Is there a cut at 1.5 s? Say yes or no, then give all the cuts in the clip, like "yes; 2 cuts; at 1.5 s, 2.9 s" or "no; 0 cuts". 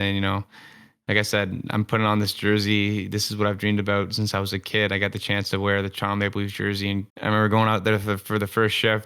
no; 1 cut; at 7.1 s